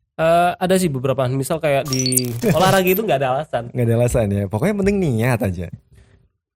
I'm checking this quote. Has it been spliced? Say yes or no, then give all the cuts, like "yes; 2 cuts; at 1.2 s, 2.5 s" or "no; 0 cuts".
yes; 1 cut; at 2.3 s